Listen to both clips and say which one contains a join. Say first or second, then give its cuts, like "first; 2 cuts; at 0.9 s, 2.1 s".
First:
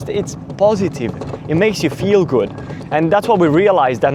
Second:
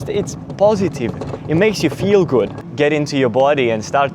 second; 1 cut; at 2.6 s